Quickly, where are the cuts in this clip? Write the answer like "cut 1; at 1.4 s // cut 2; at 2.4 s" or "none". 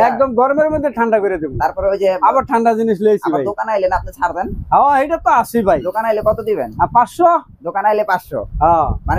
none